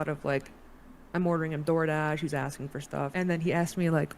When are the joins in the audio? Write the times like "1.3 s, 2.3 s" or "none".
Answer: 3.1 s